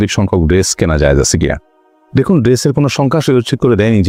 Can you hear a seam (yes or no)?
no